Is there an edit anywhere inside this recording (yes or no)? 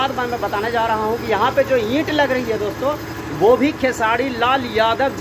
no